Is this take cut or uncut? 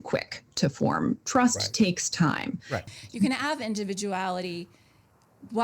cut